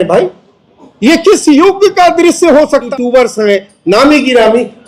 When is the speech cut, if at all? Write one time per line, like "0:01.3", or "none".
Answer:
0:02.9